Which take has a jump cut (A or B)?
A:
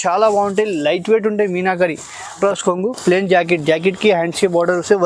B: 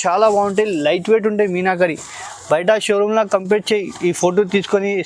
A